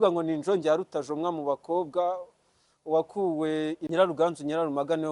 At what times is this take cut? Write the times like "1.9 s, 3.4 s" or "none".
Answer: 3.8 s